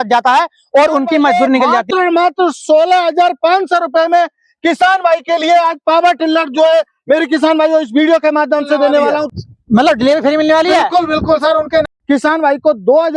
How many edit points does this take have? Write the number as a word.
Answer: three